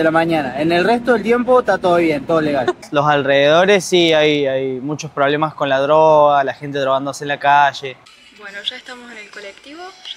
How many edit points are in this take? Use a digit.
2